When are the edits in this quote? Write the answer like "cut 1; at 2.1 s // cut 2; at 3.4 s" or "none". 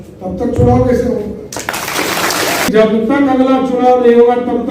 cut 1; at 2.7 s